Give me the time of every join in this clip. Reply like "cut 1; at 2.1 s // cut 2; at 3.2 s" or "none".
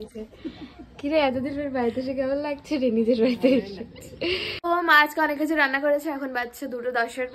cut 1; at 4.5 s